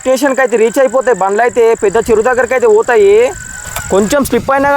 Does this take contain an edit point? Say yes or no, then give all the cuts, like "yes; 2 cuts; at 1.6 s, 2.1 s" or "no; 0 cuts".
yes; 1 cut; at 3.7 s